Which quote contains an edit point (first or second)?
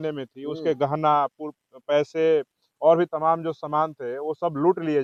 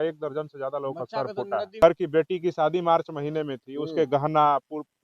second